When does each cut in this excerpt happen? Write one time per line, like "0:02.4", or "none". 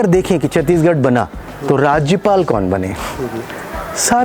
none